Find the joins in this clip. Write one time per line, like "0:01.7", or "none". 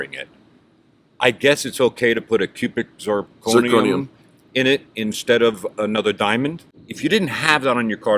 0:06.7